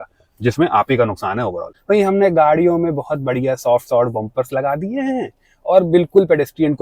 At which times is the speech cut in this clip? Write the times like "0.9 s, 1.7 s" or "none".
1.7 s